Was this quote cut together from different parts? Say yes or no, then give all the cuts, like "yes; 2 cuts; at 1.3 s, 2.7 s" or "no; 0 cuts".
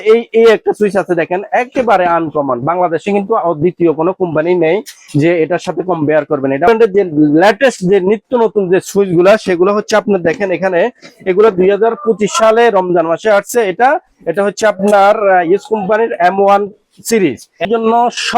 yes; 2 cuts; at 6.7 s, 17.7 s